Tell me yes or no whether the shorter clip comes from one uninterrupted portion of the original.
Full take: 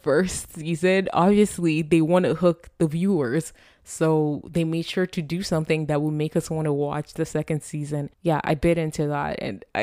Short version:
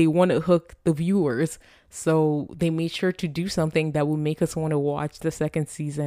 yes